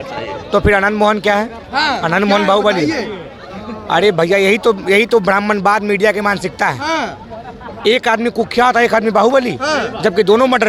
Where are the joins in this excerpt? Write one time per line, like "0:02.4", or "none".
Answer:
none